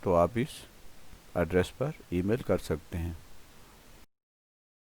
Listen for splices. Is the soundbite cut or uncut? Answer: cut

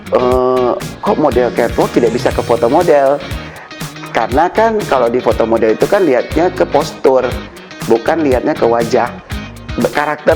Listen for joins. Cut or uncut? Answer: uncut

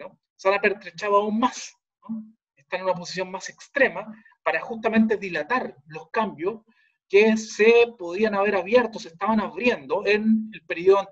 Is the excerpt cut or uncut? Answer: cut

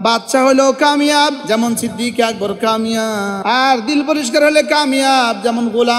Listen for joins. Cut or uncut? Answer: cut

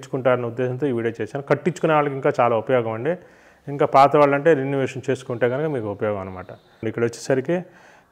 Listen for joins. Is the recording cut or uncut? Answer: cut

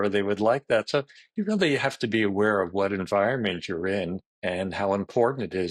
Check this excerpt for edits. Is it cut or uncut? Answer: cut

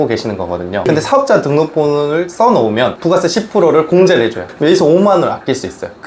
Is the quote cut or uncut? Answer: cut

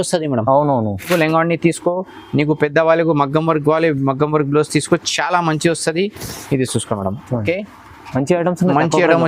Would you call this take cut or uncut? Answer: cut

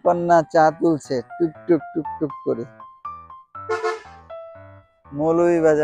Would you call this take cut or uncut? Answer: uncut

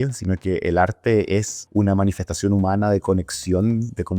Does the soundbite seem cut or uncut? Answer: cut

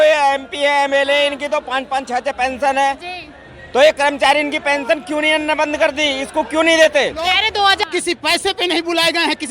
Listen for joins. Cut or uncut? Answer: cut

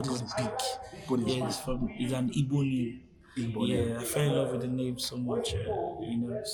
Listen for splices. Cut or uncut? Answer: uncut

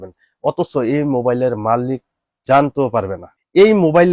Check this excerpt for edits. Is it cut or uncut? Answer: cut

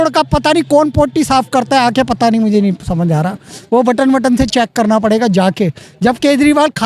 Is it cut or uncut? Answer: uncut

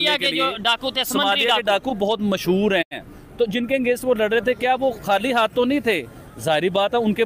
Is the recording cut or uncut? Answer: uncut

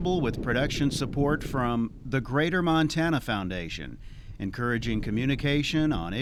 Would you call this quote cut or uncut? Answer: uncut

